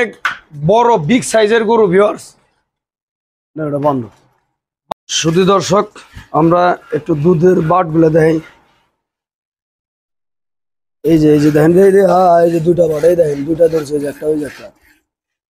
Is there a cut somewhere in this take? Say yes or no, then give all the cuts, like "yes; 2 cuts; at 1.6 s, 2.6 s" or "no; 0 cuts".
yes; 1 cut; at 4.8 s